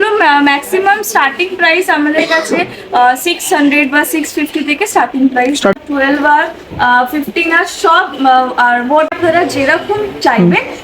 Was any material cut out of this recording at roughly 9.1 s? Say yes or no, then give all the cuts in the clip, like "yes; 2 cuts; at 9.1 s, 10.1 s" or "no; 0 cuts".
yes; 2 cuts; at 5.7 s, 9.1 s